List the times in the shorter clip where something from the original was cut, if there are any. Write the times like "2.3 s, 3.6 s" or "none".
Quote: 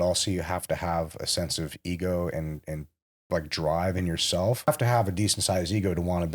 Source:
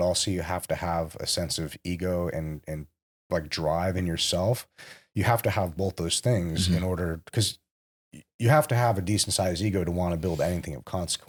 4.7 s

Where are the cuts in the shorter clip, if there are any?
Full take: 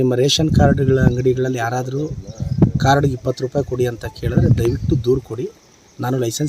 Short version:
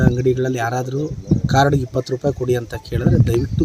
1.2 s

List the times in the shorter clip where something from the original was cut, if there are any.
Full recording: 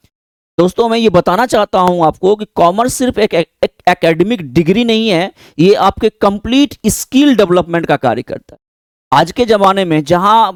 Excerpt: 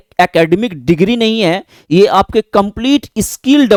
none

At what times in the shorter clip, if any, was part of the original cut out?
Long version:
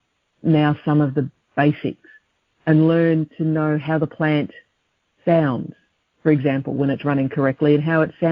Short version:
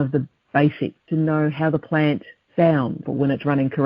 1.0 s, 2.4 s, 3.1 s

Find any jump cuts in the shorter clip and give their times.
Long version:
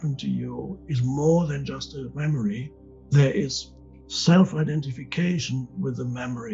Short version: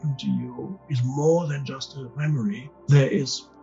2.7 s

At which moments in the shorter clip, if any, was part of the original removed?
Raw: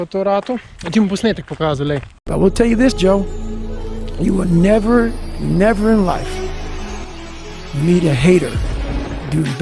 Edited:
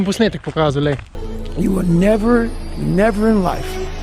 1.1 s

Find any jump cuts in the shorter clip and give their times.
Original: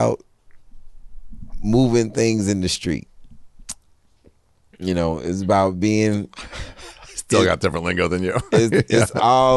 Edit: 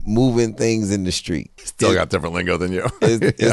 1.6 s

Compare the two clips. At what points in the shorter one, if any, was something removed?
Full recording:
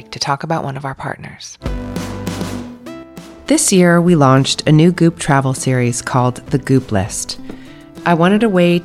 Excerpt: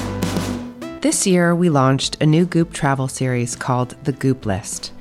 0.9 s

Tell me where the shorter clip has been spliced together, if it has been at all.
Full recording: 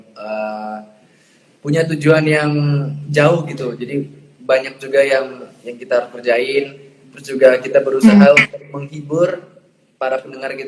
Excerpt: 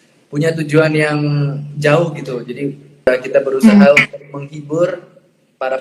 3.1 s

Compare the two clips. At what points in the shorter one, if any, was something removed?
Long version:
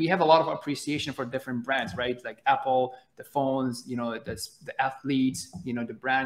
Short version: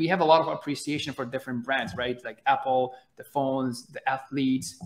3.8 s

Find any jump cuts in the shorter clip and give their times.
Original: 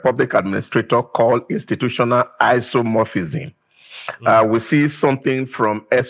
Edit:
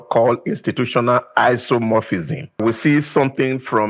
2.6 s

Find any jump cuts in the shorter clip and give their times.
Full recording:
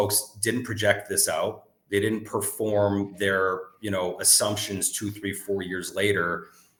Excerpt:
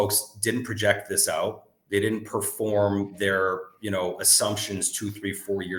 none

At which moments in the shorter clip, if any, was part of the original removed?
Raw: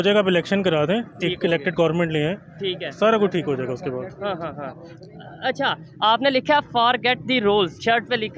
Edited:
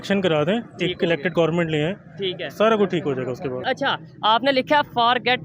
3.6 s

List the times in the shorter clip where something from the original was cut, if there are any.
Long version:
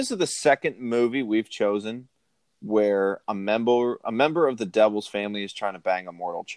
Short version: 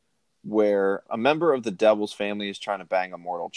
1.1 s

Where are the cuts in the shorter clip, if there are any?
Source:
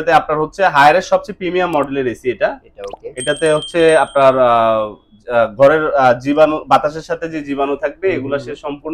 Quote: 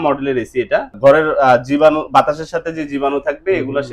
1.0 s

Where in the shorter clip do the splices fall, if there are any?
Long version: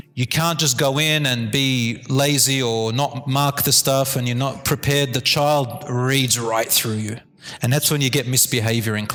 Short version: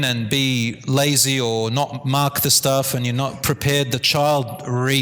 none

